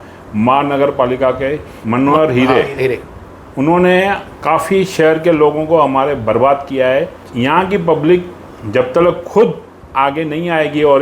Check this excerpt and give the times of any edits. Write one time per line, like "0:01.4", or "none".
0:07.2